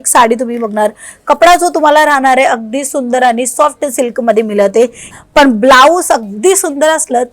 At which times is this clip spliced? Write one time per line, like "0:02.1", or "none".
0:05.1